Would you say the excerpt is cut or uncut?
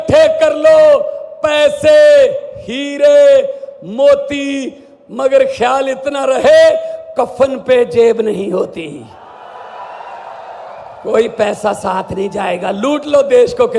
uncut